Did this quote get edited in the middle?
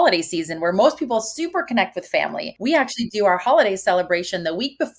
yes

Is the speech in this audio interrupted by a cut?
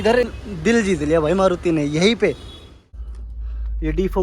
yes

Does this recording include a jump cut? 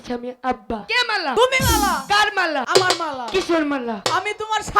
yes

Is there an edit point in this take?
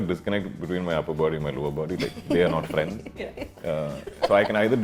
no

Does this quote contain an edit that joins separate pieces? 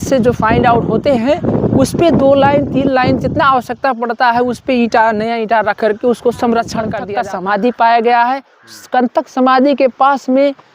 yes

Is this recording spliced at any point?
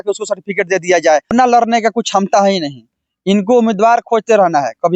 yes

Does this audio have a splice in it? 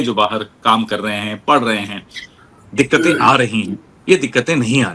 no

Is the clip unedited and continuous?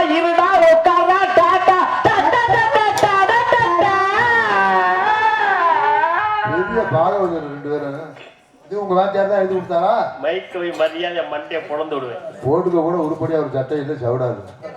yes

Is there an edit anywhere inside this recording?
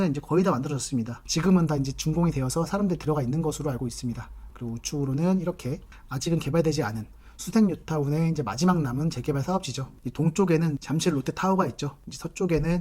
yes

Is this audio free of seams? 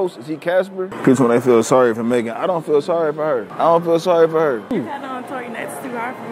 no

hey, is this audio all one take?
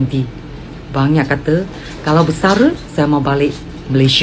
yes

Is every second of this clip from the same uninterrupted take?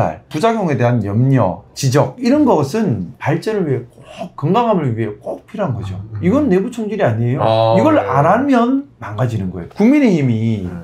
yes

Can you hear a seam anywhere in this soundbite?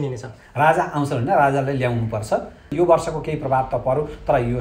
yes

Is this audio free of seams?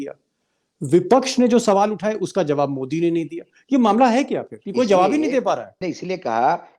no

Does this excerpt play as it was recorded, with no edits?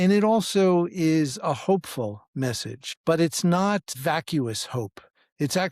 no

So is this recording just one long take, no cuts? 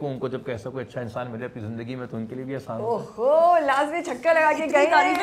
yes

